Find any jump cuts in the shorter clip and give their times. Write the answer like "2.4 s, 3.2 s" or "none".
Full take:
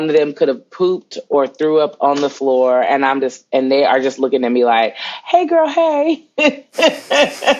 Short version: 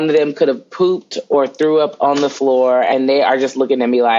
2.9 s